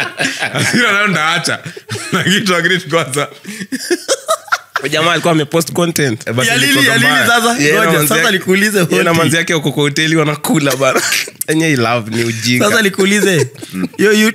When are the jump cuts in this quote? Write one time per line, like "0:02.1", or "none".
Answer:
none